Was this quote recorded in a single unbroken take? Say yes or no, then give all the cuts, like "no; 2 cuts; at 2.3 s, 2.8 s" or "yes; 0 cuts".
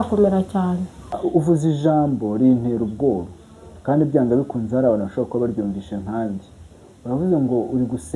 no; 1 cut; at 1.1 s